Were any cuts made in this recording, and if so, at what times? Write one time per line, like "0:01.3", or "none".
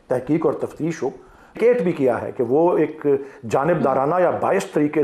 0:01.6